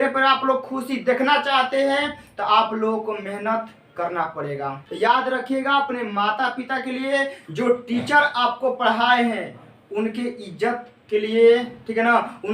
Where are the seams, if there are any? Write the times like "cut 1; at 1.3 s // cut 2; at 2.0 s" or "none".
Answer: cut 1; at 4.8 s